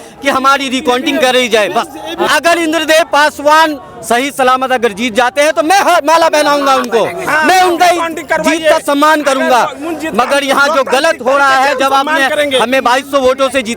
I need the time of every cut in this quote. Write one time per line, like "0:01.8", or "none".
0:02.3